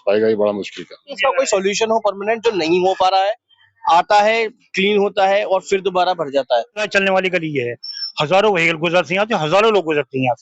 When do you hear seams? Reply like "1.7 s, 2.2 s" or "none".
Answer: 1.1 s, 6.9 s

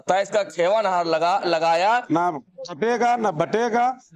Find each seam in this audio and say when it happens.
2.0 s

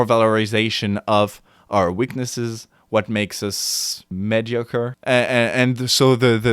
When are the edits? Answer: 4.1 s, 5.0 s

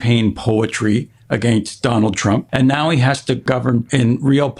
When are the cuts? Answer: 2.4 s, 3.7 s

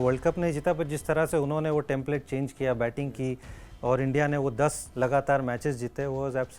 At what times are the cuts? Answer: none

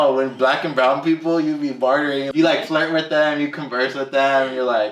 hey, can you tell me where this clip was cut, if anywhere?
2.3 s

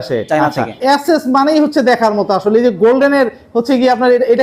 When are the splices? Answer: 1.2 s

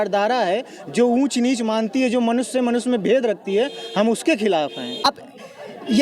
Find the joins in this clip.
5.1 s

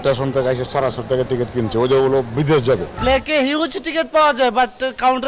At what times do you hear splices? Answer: 2.9 s

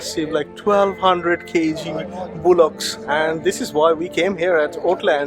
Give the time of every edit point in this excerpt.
2.9 s

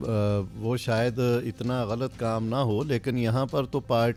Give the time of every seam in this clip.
none

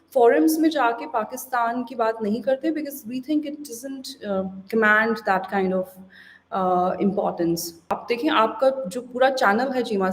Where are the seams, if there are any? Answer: 7.9 s

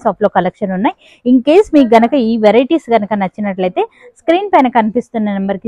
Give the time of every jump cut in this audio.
none

